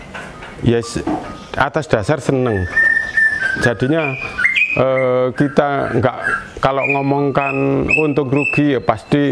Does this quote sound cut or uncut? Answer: uncut